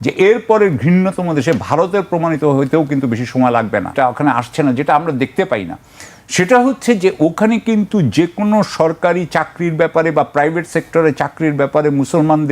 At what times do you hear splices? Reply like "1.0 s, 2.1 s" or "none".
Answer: 3.9 s

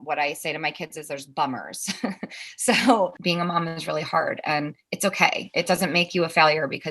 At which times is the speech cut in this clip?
3.2 s

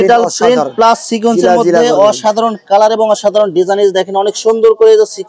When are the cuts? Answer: none

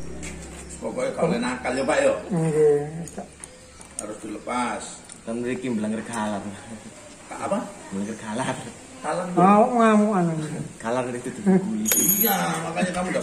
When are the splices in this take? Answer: none

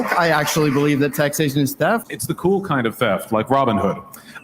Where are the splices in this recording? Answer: 2.0 s

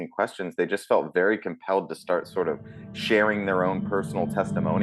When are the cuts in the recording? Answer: none

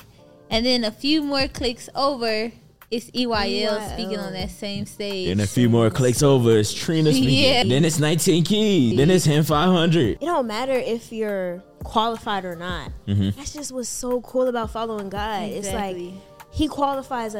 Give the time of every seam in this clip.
7.6 s, 8.9 s, 10.2 s

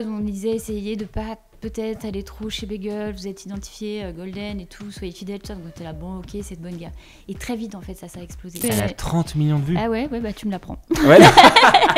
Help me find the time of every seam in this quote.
8.6 s

